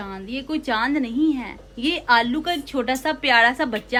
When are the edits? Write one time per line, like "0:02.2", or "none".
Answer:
none